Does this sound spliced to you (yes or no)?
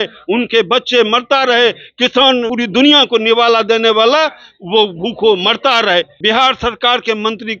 yes